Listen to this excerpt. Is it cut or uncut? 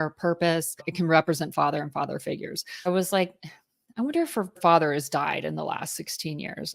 cut